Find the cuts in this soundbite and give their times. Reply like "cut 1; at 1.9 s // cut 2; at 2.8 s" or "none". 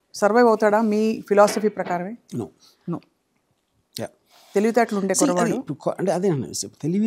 none

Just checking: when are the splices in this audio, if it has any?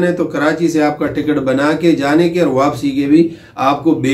none

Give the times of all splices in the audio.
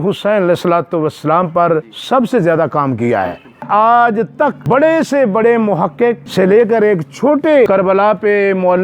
cut 1; at 1.9 s // cut 2; at 3.7 s // cut 3; at 4.6 s // cut 4; at 6.2 s // cut 5; at 7.7 s

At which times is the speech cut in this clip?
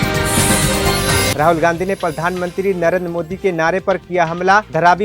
cut 1; at 1.3 s

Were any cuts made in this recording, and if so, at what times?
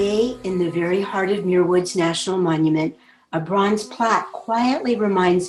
none

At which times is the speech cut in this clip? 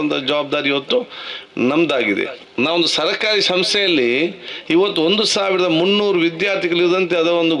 cut 1; at 2.4 s

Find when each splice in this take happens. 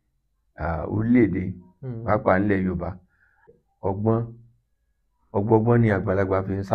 cut 1; at 3.4 s

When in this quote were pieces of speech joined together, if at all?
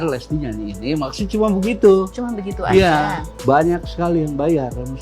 cut 1; at 3.3 s

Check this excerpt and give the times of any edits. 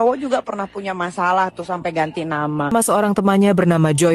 cut 1; at 2.7 s

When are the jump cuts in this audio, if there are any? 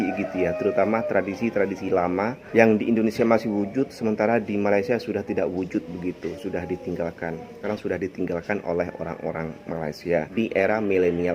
cut 1; at 2.4 s // cut 2; at 7.6 s // cut 3; at 10.3 s

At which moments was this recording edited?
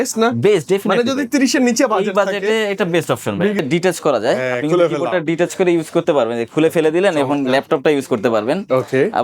cut 1; at 3.6 s

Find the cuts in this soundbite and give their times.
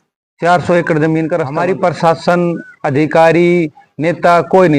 cut 1; at 1.5 s

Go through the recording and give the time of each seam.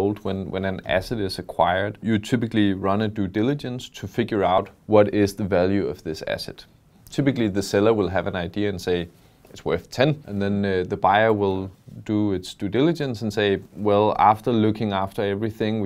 cut 1; at 2.0 s // cut 2; at 4.6 s // cut 3; at 10.2 s

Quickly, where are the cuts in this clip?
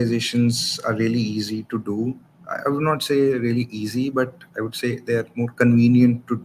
none

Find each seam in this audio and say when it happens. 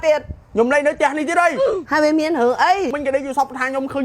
cut 1; at 3.0 s

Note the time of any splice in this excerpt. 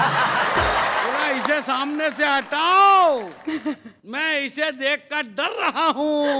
cut 1; at 1.2 s

